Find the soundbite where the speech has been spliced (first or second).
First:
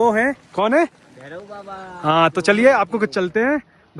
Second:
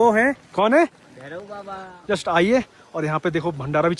second